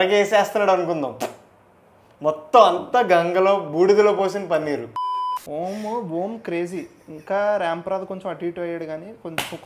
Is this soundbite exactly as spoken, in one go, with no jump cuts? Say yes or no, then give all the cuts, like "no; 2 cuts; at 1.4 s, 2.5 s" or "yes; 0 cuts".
no; 1 cut; at 4.9 s